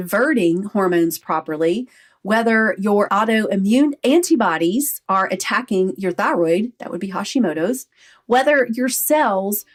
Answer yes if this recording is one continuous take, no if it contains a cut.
yes